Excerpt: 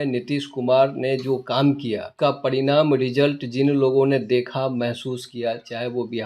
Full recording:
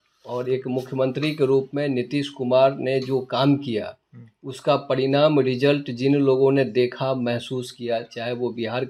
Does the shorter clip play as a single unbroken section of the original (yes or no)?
no